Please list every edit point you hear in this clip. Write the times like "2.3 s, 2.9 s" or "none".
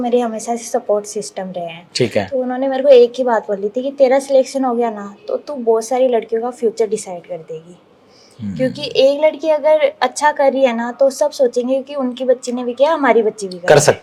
none

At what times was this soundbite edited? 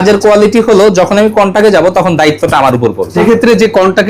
3.2 s

